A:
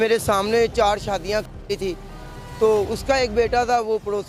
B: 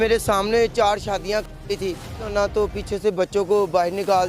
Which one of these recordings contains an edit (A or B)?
B